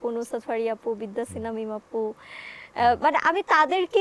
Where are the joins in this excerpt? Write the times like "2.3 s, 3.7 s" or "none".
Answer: none